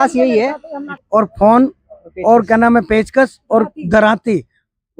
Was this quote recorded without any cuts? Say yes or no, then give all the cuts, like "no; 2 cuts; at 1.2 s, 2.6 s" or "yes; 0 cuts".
no; 1 cut; at 1.0 s